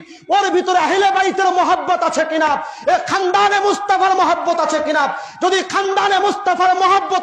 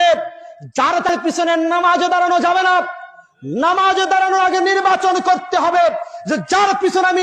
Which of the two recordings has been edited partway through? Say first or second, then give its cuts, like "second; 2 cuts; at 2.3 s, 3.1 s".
second; 1 cut; at 1.1 s